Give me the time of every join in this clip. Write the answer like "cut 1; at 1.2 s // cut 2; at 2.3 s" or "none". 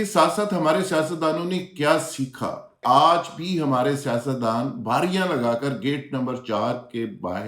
cut 1; at 2.8 s